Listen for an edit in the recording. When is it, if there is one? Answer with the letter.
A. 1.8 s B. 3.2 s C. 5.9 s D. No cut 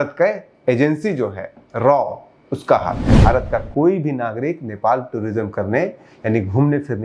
B